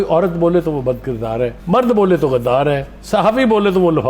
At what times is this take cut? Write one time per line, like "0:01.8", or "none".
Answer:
none